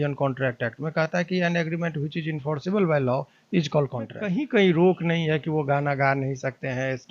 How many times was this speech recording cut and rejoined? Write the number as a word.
one